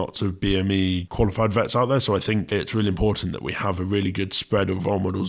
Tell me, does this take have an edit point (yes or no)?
yes